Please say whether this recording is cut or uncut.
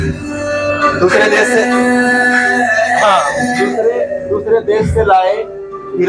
uncut